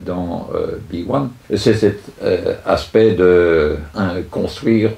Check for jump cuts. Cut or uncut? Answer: cut